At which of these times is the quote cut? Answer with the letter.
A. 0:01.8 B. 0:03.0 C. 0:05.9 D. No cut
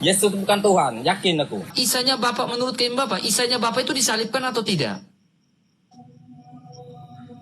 A